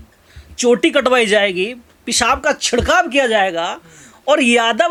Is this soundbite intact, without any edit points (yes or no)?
yes